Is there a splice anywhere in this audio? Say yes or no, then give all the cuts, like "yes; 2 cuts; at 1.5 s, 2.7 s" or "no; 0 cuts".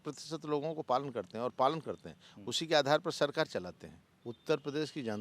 yes; 1 cut; at 4.1 s